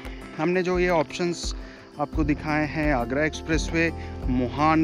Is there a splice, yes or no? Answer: no